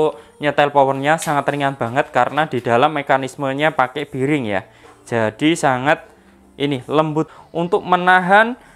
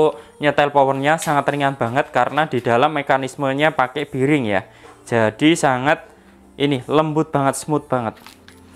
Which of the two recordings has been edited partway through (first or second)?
first